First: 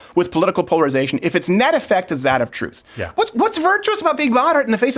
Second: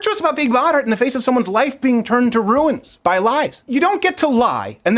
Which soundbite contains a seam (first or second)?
second